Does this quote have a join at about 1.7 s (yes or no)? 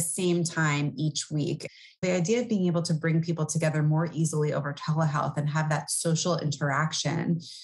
yes